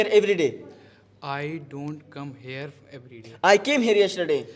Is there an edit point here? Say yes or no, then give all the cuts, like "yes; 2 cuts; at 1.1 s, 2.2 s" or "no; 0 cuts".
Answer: no; 0 cuts